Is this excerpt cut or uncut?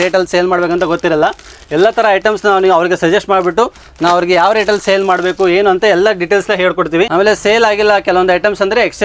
uncut